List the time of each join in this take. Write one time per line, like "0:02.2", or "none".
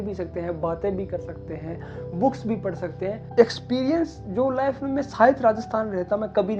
0:03.2